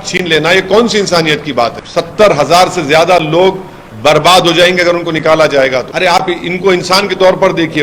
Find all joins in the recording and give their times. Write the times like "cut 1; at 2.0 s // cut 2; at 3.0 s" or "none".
cut 1; at 1.8 s // cut 2; at 5.9 s